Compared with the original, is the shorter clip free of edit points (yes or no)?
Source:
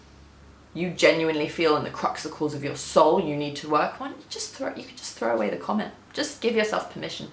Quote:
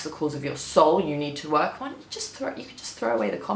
yes